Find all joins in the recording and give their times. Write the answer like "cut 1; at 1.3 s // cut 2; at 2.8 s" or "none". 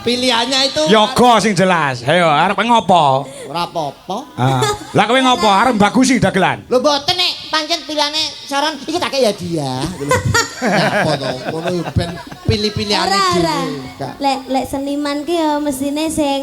none